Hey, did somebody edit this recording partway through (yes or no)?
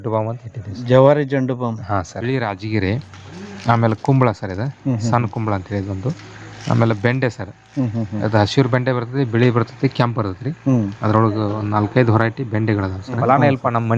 yes